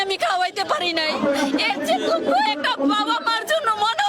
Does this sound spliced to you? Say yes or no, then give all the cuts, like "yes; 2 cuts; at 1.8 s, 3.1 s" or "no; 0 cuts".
no; 0 cuts